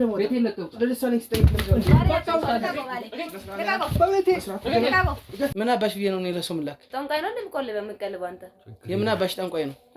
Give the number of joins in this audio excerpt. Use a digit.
1